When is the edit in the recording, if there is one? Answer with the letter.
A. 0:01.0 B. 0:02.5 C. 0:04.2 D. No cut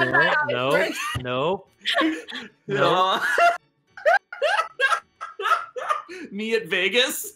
D